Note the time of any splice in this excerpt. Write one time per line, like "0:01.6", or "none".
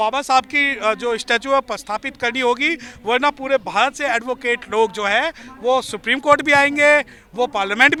none